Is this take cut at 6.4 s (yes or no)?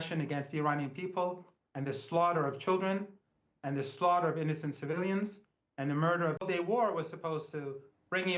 yes